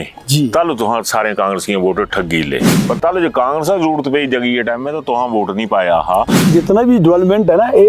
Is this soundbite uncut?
no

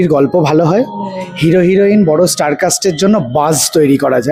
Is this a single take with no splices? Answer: yes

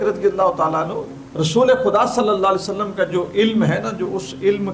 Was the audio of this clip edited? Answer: no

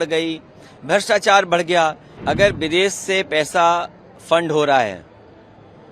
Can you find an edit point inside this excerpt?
yes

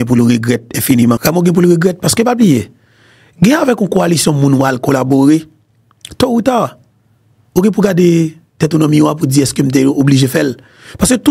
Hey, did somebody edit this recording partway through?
yes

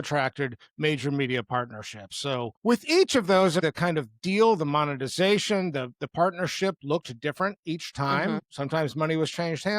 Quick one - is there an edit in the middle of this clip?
yes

